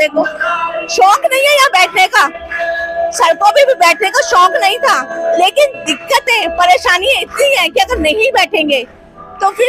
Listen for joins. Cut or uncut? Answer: uncut